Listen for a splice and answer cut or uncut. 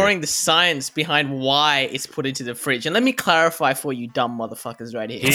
uncut